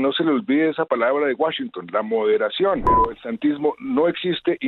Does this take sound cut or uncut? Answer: cut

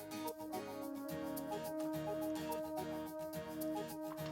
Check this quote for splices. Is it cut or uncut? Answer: uncut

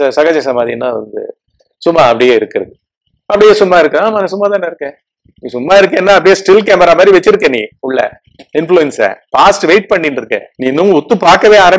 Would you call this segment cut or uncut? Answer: cut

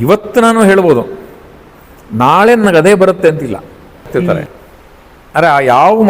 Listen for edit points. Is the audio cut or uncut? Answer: cut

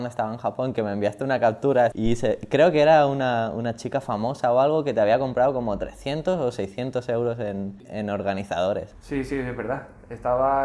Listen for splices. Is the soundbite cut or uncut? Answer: cut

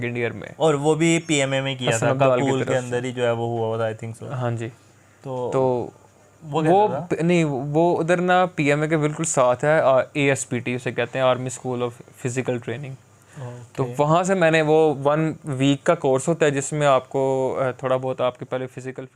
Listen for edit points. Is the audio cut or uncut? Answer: uncut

